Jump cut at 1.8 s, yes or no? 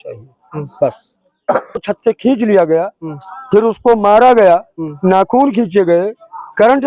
yes